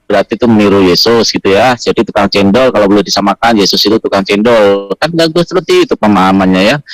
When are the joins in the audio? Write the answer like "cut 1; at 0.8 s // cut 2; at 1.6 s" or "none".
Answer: none